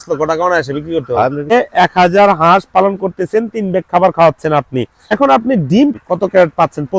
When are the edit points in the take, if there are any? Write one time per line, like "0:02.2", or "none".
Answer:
0:01.7
0:05.0
0:05.9

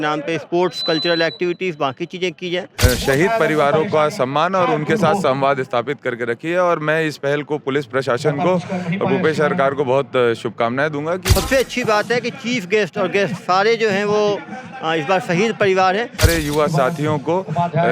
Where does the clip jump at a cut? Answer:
0:02.8
0:11.2
0:16.2

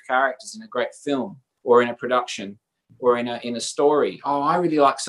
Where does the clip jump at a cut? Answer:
0:01.4

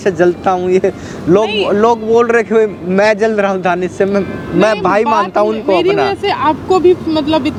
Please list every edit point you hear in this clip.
none

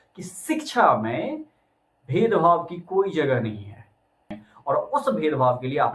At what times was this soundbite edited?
0:04.4

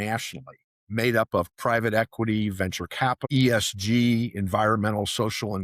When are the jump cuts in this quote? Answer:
0:03.2

